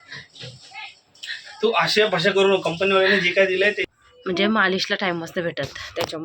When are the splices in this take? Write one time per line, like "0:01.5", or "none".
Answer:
0:03.9